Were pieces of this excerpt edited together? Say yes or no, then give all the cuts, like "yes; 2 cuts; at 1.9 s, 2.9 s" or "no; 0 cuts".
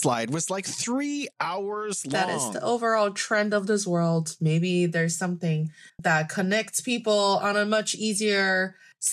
yes; 2 cuts; at 2.1 s, 6.0 s